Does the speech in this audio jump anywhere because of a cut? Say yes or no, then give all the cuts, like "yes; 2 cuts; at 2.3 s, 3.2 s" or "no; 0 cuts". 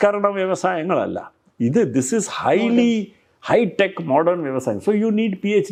no; 0 cuts